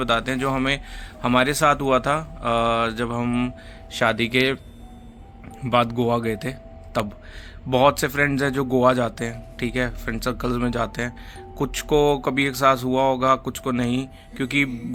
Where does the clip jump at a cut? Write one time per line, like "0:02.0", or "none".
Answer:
none